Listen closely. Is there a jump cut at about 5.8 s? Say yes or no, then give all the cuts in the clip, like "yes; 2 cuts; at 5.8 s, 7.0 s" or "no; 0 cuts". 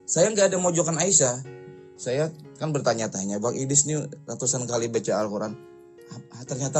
no; 1 cut; at 1.6 s